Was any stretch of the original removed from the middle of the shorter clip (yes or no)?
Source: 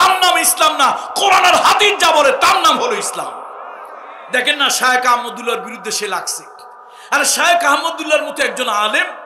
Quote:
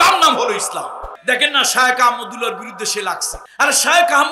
yes